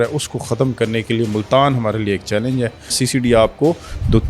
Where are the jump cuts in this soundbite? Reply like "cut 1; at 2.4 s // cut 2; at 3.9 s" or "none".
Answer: cut 1; at 3.0 s